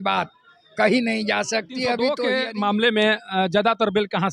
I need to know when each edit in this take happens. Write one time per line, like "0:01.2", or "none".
0:02.2